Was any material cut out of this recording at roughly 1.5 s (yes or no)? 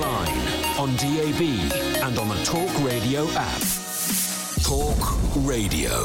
no